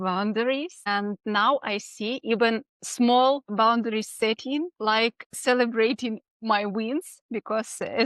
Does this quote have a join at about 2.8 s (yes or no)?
yes